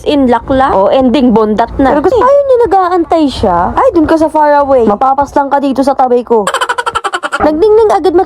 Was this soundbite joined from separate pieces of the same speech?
yes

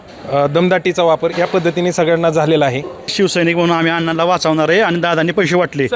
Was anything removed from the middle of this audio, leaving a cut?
yes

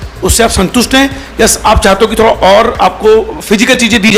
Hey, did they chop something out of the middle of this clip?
no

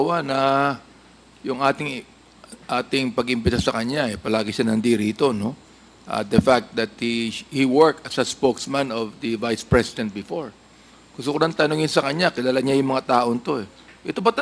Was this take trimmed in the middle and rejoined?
no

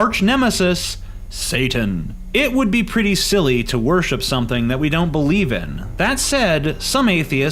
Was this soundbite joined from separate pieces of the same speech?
yes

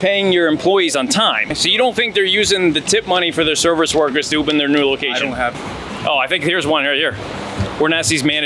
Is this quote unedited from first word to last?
no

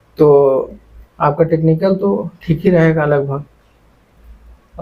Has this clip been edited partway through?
no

